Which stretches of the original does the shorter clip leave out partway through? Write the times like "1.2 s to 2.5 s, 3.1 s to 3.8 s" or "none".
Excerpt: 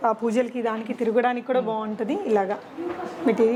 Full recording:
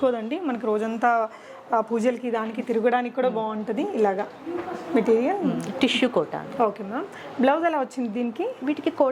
none